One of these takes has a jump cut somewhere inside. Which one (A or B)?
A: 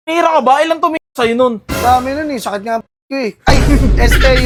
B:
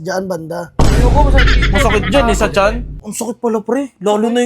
B